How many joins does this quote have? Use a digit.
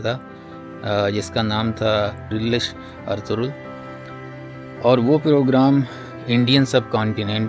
1